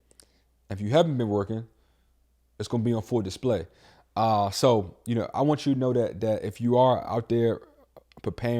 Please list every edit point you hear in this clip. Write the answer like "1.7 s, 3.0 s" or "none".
none